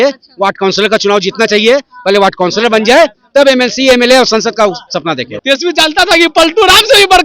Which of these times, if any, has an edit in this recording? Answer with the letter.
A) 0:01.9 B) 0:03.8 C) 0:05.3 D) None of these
C